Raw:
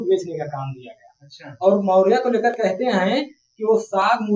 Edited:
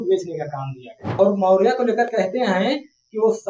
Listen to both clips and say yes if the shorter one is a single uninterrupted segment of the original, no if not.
no